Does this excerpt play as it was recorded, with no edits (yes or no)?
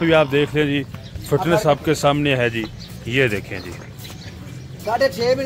yes